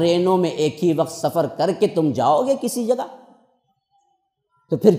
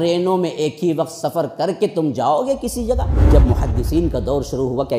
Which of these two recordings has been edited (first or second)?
second